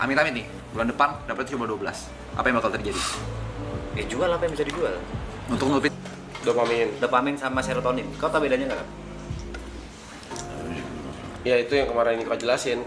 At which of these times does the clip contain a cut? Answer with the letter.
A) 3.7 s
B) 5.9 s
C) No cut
B